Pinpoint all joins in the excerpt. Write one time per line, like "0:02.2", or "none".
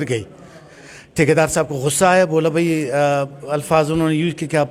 none